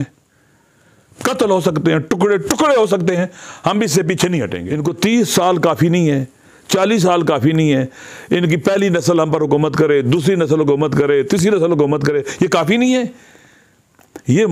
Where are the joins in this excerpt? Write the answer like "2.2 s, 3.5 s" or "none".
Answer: 4.6 s